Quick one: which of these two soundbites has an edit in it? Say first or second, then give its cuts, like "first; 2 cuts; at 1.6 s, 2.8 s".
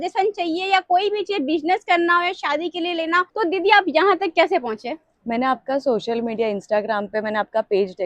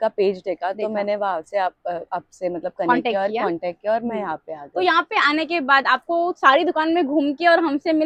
first; 1 cut; at 3.3 s